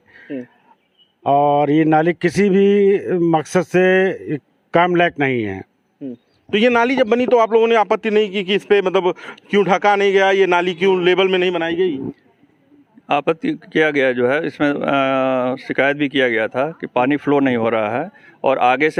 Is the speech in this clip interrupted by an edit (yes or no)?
no